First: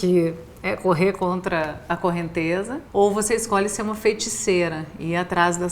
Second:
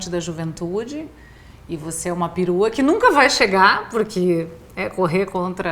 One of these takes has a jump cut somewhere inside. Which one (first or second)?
first